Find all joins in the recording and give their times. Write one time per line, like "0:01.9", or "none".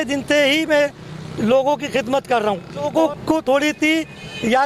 0:02.9